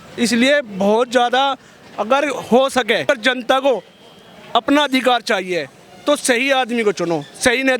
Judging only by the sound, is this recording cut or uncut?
cut